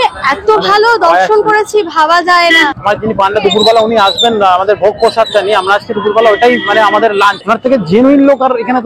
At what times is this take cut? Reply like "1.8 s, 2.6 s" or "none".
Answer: 2.7 s, 7.4 s